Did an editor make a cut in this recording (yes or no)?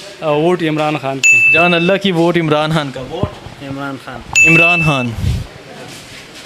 no